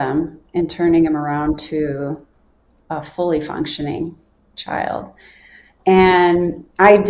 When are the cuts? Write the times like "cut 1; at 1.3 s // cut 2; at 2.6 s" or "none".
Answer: none